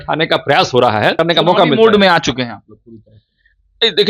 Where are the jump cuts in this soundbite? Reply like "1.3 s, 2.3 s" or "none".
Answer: 1.2 s